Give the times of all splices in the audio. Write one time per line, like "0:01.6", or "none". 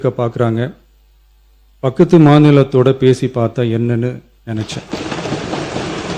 none